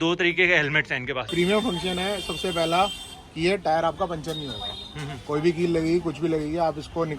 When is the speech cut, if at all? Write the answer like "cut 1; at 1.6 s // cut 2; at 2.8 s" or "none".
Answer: cut 1; at 1.2 s